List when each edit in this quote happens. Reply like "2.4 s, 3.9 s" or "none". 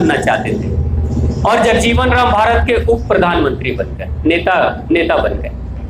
none